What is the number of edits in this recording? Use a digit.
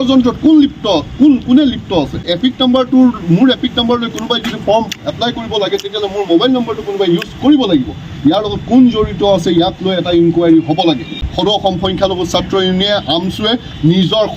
2